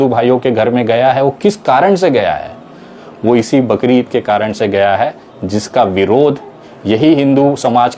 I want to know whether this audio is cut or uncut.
uncut